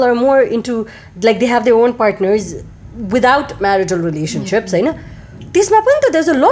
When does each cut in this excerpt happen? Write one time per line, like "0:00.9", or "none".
none